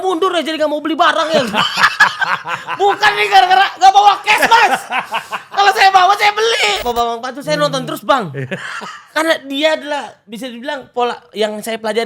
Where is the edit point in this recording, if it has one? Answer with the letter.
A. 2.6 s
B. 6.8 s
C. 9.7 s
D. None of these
B